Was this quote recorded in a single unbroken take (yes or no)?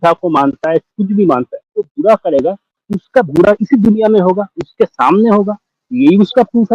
no